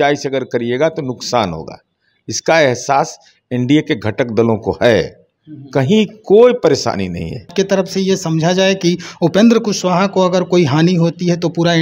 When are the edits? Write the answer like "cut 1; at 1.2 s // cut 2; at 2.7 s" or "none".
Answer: cut 1; at 7.5 s